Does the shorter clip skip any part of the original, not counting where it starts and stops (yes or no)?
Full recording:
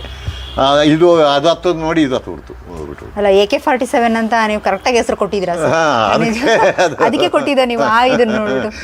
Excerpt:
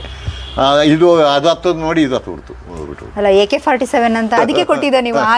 yes